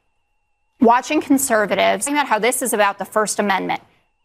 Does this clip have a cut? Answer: yes; 1 cut; at 2.1 s

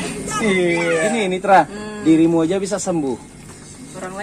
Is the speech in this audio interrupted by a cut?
yes; 1 cut; at 1.1 s

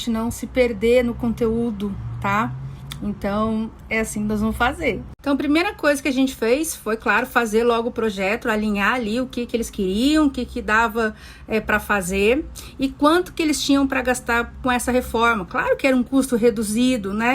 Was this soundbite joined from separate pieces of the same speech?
no; 0 cuts

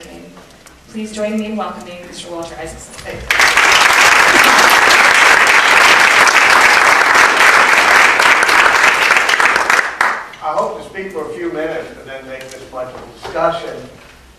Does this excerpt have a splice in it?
no; 0 cuts

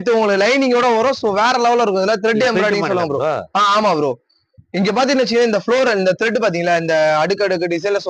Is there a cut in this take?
no; 0 cuts

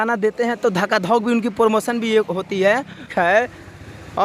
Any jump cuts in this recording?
yes; 1 cut; at 3.1 s

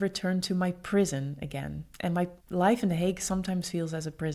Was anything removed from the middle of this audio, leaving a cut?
yes; 1 cut; at 2.4 s

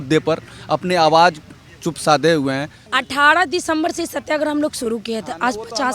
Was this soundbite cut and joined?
yes; 1 cut; at 2.8 s

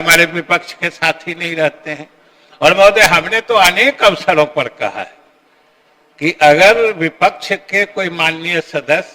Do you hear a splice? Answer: no; 0 cuts

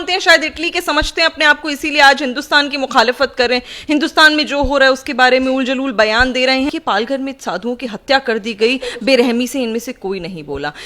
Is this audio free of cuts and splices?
no; 1 cut; at 6.7 s

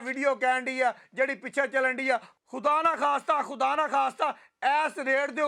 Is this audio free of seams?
yes; 0 cuts

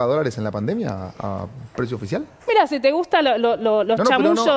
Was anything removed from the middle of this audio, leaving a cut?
no; 0 cuts

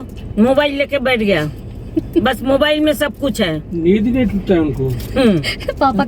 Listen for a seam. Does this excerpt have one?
no; 0 cuts

